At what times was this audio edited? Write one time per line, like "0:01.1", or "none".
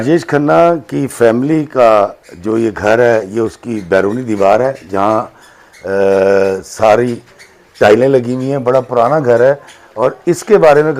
none